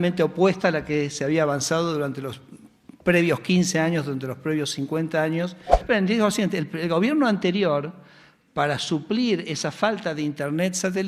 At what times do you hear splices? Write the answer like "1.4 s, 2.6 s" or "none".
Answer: 5.8 s